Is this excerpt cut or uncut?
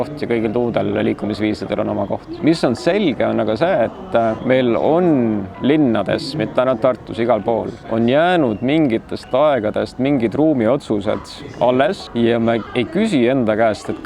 cut